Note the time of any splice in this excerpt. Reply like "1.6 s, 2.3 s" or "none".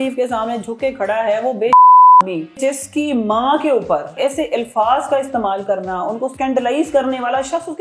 2.6 s, 4.1 s, 6.3 s